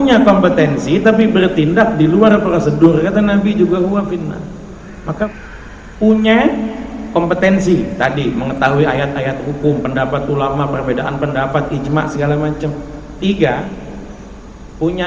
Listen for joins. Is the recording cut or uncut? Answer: cut